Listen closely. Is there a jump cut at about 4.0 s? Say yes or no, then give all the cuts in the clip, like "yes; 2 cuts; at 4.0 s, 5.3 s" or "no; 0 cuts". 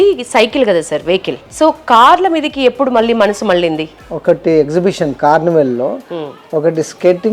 yes; 2 cuts; at 1.4 s, 4.0 s